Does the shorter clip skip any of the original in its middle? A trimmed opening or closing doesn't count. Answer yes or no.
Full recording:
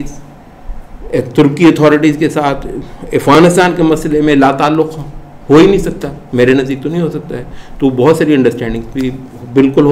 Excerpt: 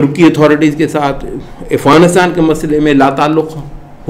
no